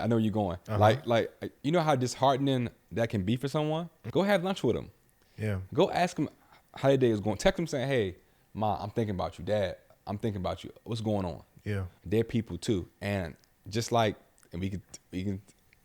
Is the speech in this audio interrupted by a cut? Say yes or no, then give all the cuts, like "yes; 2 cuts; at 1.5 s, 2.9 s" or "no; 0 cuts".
yes; 2 cuts; at 4.0 s, 11.9 s